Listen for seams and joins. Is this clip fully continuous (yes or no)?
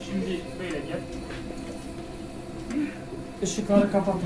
yes